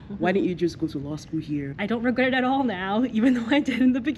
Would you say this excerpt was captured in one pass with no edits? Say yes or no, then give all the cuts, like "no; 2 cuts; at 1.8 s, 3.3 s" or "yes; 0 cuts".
no; 1 cut; at 1.7 s